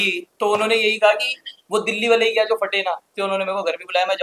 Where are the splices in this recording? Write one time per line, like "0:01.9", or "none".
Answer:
0:03.1